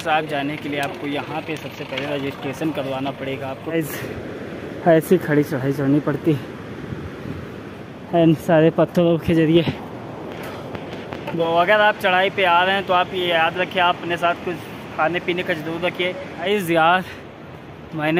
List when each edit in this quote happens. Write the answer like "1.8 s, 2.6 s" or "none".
3.6 s, 11.4 s, 16.3 s

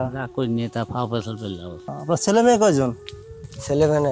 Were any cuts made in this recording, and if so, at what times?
2.0 s

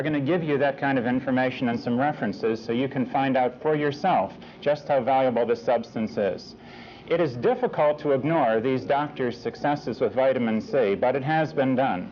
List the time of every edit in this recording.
none

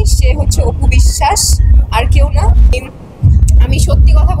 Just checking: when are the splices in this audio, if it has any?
2.7 s

